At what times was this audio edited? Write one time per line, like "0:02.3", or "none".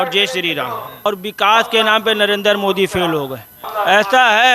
0:01.1
0:03.6